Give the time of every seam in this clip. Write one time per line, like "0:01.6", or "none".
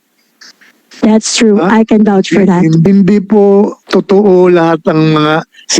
0:02.8
0:03.8